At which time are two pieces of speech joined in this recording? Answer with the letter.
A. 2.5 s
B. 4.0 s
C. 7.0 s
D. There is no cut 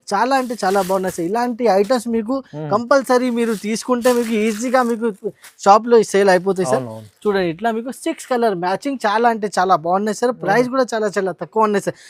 D